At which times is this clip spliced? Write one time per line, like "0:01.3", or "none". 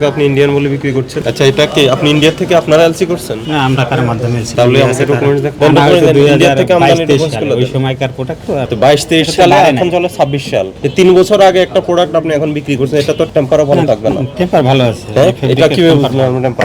0:01.2
0:04.4
0:05.5
0:08.7
0:13.3